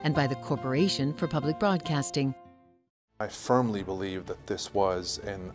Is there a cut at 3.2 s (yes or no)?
yes